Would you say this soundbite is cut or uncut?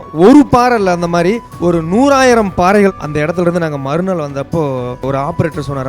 cut